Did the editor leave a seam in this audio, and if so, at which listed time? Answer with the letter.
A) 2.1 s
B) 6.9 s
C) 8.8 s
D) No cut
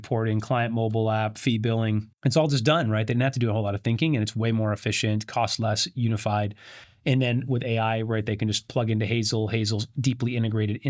A